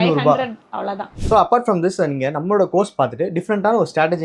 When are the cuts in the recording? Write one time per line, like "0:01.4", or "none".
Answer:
0:01.1